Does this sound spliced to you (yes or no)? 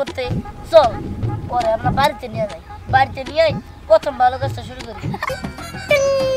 yes